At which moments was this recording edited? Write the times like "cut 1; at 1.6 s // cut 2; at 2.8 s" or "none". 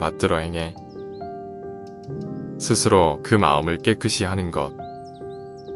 cut 1; at 0.7 s // cut 2; at 2.0 s // cut 3; at 4.7 s